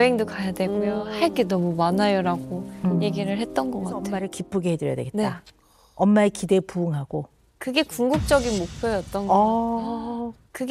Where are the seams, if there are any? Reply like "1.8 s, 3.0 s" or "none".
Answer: 4.1 s